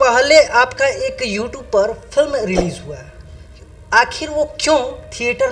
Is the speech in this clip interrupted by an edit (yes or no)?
no